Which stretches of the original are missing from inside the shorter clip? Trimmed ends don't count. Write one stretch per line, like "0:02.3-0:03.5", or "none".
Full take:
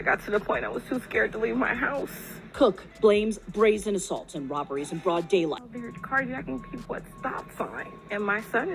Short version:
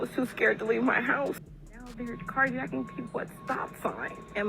0:02.5-0:05.6